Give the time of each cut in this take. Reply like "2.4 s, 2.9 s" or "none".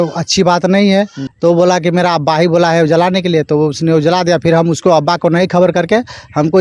1.2 s